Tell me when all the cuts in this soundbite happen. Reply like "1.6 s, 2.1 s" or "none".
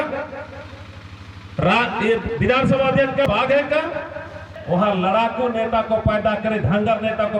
3.2 s, 4.5 s